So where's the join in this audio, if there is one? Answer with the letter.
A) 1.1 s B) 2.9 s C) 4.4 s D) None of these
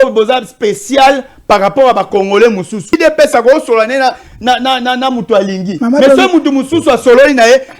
B